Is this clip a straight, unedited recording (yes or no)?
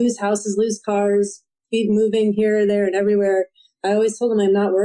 yes